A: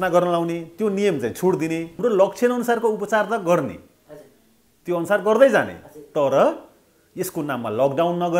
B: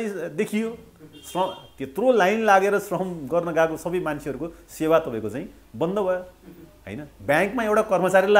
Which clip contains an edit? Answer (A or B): A